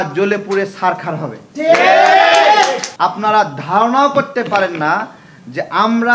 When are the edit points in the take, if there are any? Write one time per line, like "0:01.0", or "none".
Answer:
0:02.9